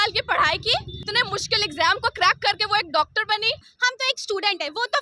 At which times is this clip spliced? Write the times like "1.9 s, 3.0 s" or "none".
1.0 s, 3.8 s